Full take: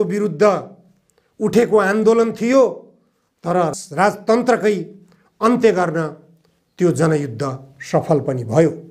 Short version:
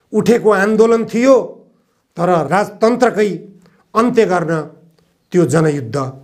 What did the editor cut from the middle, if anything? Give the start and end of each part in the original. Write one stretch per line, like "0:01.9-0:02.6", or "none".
0:03.7-0:03.9